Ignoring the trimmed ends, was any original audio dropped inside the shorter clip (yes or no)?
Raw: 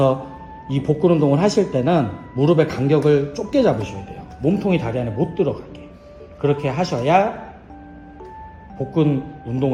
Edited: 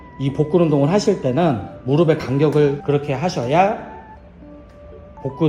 yes